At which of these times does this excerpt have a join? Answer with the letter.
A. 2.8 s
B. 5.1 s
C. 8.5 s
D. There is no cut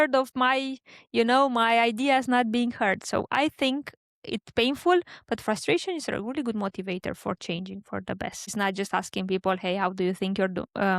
C